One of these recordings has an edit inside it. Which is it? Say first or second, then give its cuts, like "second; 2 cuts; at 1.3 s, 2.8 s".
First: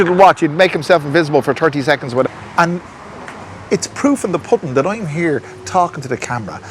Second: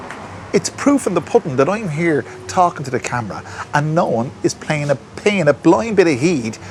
first; 1 cut; at 2.2 s